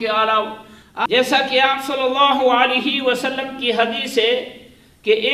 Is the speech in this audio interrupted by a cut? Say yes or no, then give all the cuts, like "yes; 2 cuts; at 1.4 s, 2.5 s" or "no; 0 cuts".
yes; 1 cut; at 1.1 s